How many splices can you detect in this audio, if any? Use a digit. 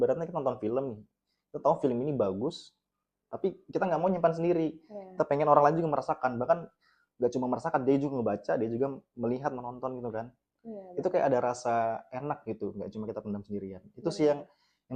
0